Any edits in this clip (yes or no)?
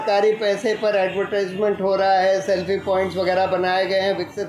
no